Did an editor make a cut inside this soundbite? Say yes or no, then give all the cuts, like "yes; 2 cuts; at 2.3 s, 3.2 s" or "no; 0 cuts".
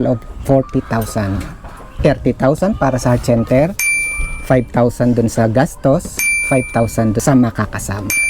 yes; 1 cut; at 7.2 s